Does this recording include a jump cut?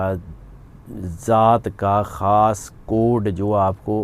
no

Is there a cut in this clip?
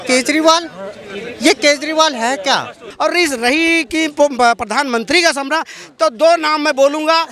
yes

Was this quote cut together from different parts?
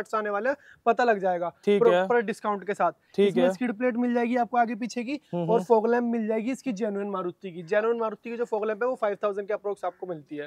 no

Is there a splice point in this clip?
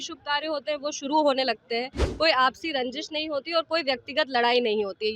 yes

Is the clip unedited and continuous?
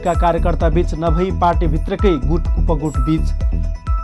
yes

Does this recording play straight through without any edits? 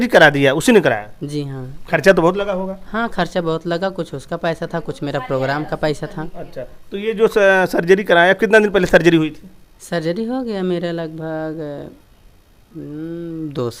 yes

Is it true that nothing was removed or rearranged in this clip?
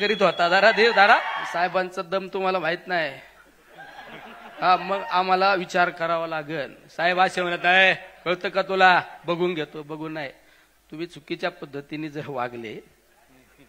no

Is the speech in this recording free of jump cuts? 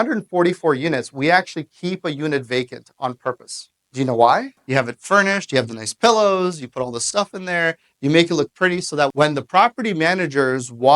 no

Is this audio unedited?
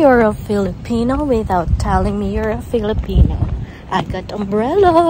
yes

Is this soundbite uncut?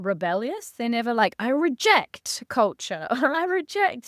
yes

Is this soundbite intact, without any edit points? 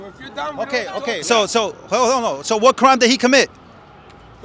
no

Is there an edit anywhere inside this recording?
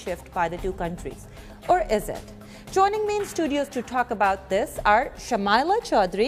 yes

